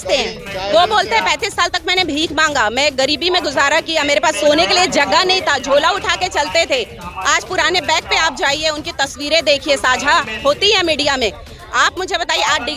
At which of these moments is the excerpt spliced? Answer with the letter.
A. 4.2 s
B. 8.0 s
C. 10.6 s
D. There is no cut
D